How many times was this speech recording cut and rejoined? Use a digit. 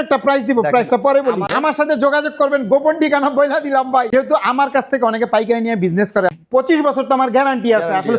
3